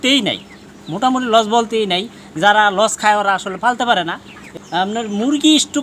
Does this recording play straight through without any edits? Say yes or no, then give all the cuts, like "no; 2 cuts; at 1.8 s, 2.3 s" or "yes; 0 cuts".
no; 1 cut; at 4.5 s